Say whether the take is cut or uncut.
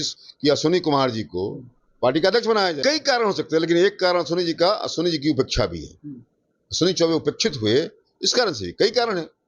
cut